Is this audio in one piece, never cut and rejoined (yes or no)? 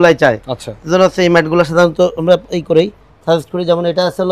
yes